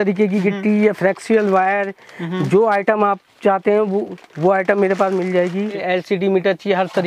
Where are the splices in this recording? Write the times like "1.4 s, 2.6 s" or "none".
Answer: 5.8 s